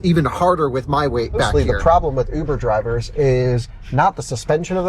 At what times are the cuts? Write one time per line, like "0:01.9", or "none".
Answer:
0:01.5